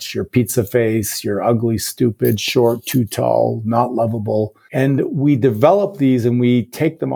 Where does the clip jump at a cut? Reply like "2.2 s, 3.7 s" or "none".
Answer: 4.6 s

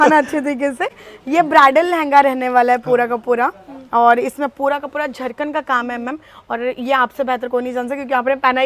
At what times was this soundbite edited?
none

